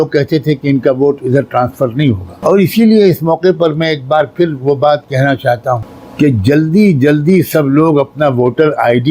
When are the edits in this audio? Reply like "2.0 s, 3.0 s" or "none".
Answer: 2.3 s, 6.0 s

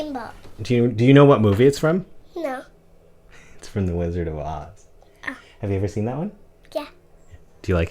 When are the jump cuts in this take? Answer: 2.2 s

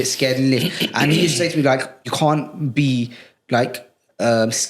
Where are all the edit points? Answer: 2.1 s

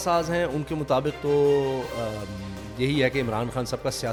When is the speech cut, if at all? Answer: none

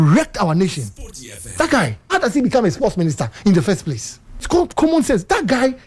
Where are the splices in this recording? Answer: 2.0 s, 4.5 s

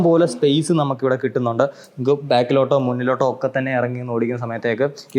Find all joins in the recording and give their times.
none

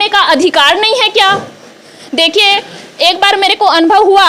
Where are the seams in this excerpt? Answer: none

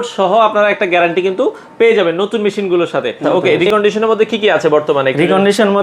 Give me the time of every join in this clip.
3.5 s

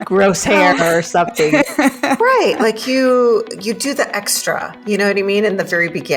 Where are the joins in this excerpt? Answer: none

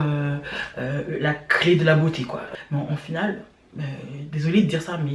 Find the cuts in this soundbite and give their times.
2.5 s

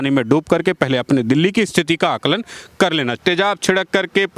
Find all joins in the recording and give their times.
3.2 s

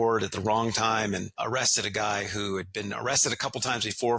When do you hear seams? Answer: 1.4 s

